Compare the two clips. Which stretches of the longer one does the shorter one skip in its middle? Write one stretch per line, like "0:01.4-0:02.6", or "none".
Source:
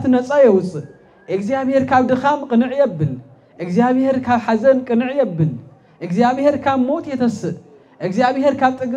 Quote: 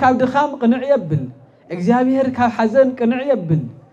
none